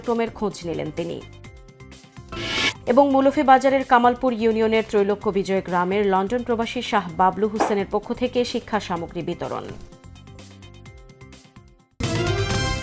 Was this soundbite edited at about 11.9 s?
yes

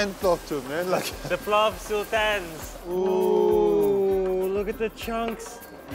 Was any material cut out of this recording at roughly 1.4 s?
no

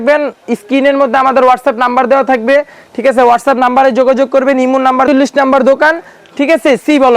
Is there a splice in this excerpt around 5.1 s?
yes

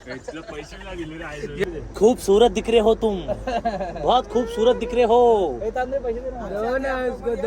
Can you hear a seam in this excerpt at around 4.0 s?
no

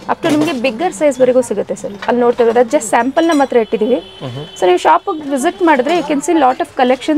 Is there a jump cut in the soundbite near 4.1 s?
no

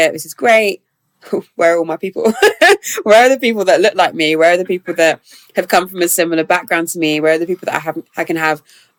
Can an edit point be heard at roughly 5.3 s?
no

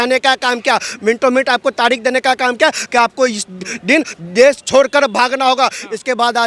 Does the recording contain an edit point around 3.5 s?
no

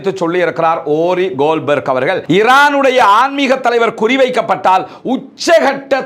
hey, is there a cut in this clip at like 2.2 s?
yes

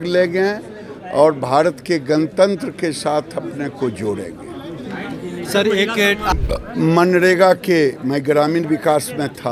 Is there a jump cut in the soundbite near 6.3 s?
yes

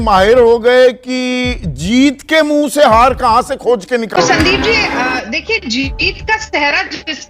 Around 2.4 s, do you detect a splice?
no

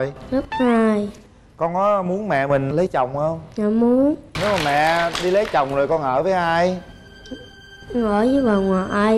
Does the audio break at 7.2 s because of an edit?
no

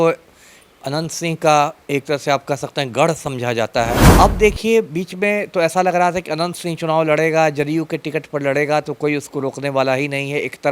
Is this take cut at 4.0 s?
yes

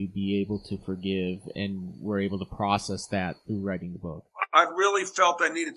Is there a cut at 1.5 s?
yes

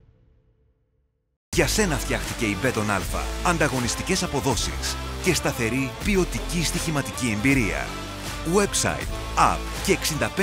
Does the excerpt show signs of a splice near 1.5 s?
yes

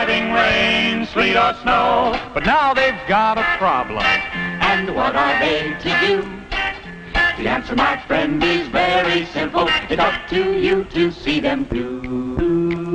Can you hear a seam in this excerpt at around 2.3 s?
no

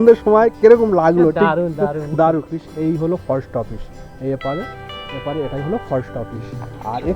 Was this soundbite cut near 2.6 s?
yes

